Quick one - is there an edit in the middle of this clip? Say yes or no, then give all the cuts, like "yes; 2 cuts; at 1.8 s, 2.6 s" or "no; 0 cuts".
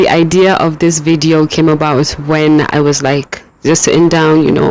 no; 0 cuts